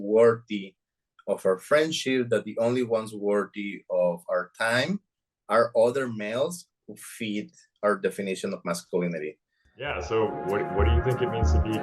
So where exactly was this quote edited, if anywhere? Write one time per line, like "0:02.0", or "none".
0:09.7

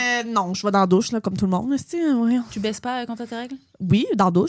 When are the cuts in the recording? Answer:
none

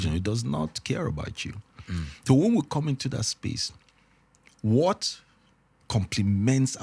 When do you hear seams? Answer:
none

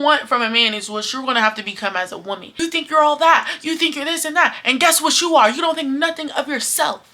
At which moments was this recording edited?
0:02.5

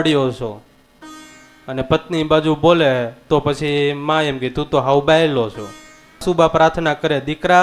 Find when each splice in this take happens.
0:06.2

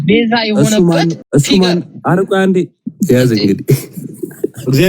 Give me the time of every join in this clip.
0:01.2
0:02.8

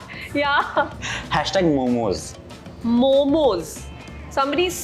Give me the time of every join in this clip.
0:01.0

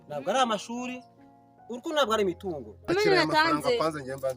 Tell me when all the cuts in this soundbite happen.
0:02.9

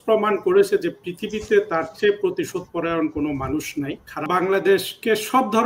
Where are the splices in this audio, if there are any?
0:04.3

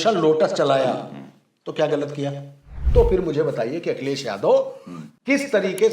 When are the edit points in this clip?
0:02.8

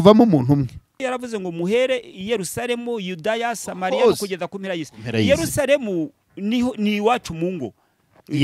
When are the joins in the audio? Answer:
0:00.9

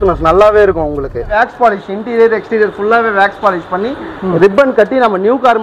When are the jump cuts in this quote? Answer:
0:01.3

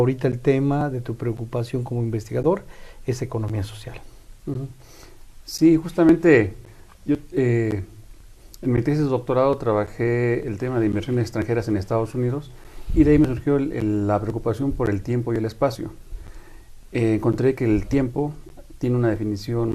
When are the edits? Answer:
none

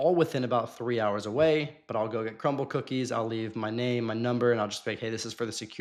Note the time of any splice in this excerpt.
none

